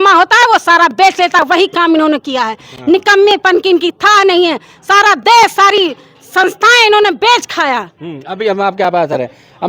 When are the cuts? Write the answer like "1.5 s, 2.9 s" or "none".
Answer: none